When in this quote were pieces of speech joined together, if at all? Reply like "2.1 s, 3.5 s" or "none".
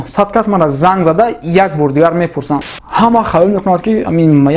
2.6 s